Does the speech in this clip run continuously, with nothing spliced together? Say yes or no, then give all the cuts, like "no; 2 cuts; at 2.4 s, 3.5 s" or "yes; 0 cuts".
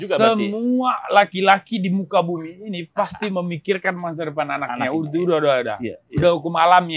yes; 0 cuts